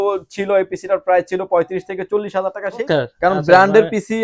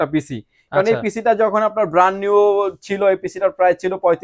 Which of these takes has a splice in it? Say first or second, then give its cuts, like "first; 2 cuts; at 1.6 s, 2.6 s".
first; 1 cut; at 2.8 s